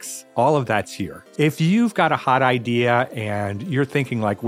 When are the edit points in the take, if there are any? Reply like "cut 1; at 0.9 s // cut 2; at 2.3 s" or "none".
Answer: cut 1; at 1.2 s